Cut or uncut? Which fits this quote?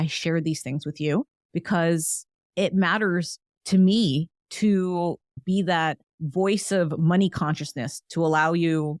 cut